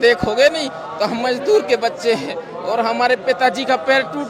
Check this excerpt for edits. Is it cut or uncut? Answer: uncut